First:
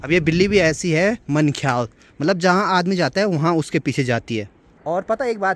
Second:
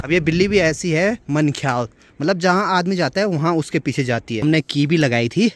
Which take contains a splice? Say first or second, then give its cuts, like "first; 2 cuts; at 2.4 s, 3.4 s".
second; 1 cut; at 4.4 s